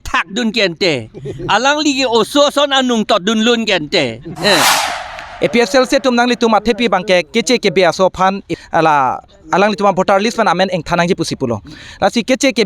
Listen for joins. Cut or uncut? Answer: cut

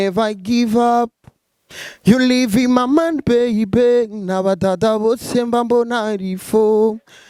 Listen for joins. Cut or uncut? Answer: uncut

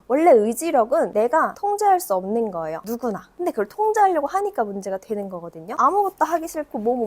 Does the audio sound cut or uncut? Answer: cut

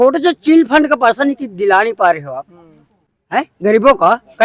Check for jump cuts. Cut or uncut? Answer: uncut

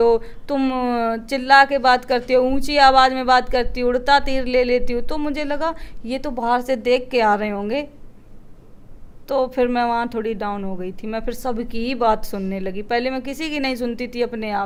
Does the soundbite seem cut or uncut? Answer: uncut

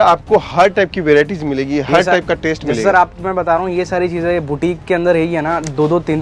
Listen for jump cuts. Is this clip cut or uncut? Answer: uncut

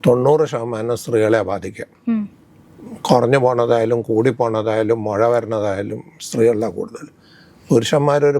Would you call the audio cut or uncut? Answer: uncut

